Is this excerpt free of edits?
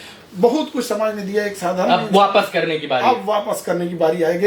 yes; 0 cuts

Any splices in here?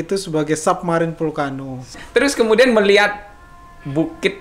yes; 1 cut; at 2.0 s

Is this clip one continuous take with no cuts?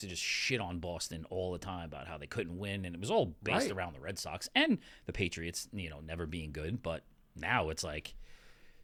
yes; 0 cuts

